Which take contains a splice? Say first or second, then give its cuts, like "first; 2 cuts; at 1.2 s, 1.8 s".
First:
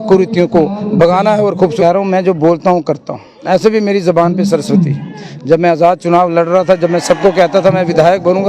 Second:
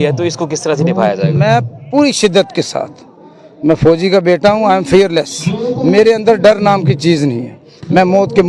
first; 1 cut; at 1.8 s